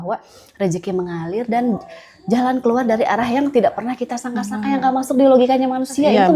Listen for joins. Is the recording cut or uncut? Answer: uncut